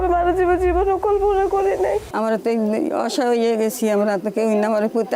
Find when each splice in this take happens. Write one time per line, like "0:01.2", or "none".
0:02.1